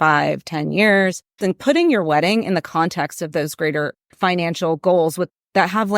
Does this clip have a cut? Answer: yes; 2 cuts; at 1.4 s, 4.1 s

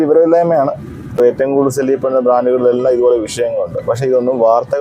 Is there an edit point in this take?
yes; 1 cut; at 1.2 s

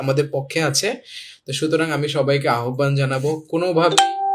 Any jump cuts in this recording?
no; 0 cuts

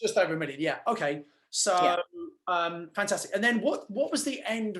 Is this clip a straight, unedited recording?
yes; 0 cuts

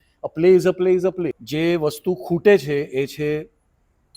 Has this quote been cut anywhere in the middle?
yes; 1 cut; at 1.4 s

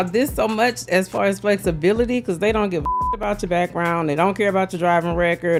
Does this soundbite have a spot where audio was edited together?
no; 0 cuts

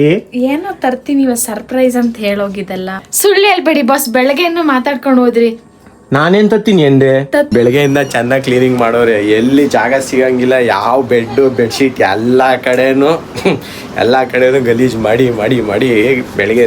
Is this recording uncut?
no; 2 cuts; at 3.1 s, 7.5 s

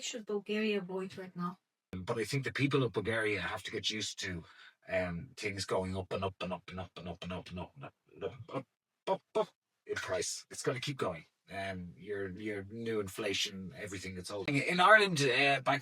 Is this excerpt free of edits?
no; 2 cuts; at 2.0 s, 14.5 s

